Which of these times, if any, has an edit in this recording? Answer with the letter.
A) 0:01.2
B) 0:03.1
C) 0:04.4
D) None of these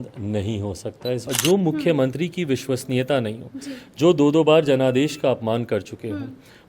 A